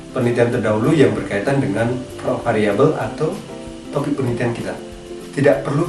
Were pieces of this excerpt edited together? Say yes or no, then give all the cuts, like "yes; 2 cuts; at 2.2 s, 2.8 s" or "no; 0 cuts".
no; 0 cuts